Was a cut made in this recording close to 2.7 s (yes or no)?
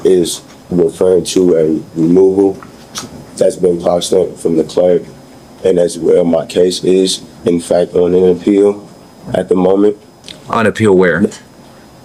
no